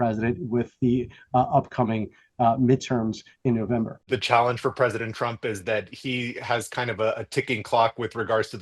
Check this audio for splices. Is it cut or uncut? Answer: cut